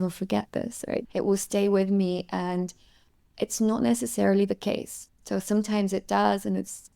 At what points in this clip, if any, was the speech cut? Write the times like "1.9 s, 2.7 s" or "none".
1.0 s